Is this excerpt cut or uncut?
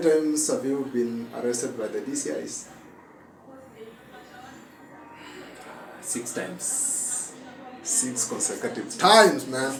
uncut